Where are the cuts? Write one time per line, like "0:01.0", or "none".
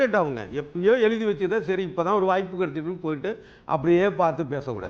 none